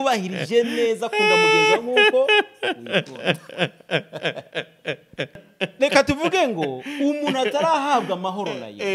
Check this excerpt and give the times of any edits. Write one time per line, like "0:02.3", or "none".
0:05.4

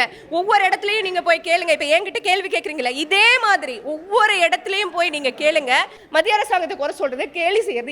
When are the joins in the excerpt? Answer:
0:06.0

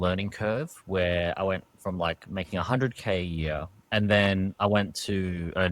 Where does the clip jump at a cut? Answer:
0:03.7

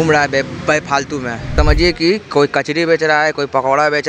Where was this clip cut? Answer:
0:01.4

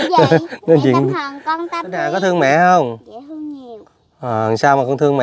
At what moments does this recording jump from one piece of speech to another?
0:02.1

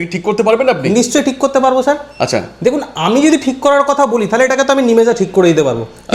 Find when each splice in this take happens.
none

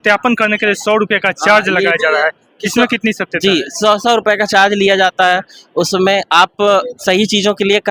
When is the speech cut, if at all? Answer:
none

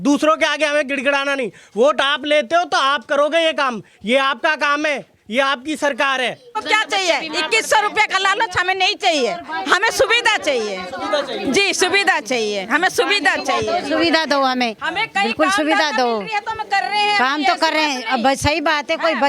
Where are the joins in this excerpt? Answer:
0:06.5

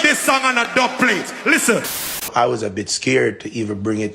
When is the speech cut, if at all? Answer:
0:02.3

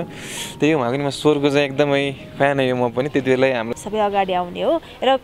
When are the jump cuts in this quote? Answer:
0:03.7

